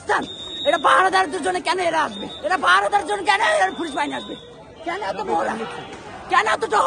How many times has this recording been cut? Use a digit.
1